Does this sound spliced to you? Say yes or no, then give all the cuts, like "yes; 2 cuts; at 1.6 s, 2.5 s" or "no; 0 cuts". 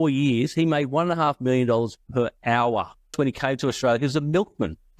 yes; 1 cut; at 3.1 s